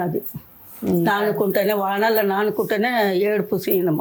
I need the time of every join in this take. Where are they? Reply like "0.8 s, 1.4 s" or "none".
none